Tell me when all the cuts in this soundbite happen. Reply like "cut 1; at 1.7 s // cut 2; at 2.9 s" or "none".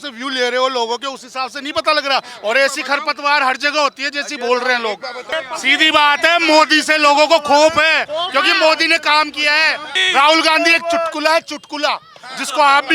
cut 1; at 5.3 s // cut 2; at 9.9 s